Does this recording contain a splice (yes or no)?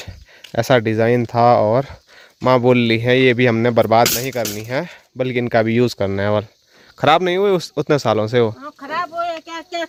no